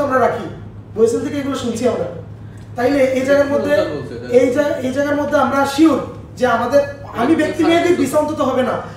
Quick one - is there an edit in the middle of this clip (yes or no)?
no